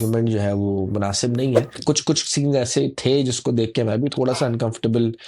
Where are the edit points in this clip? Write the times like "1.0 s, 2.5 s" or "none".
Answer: 1.8 s

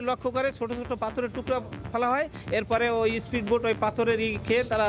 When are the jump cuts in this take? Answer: none

